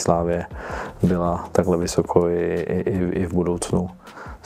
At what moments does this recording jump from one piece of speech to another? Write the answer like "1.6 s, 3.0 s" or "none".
none

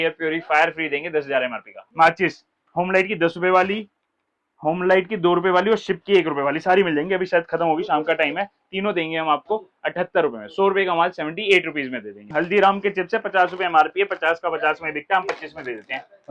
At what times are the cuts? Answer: 1.8 s, 12.3 s

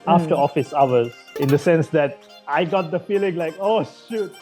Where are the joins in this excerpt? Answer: 1.2 s

